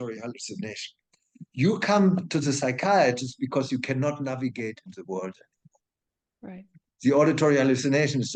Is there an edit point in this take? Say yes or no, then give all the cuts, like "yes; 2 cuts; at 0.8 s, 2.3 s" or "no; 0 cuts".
no; 0 cuts